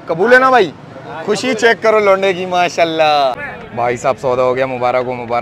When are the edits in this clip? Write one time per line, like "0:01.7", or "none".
0:03.4